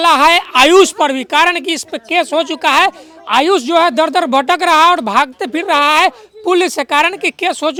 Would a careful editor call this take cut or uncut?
uncut